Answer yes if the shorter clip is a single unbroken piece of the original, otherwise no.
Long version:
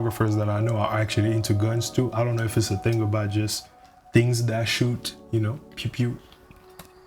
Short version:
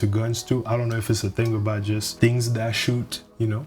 no